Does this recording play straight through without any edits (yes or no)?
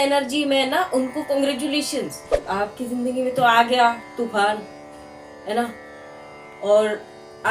no